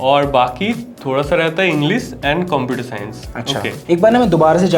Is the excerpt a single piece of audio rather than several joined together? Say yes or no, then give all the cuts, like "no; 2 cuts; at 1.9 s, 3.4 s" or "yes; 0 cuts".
no; 1 cut; at 3.7 s